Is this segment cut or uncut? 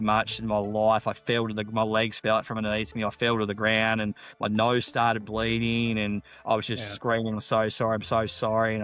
uncut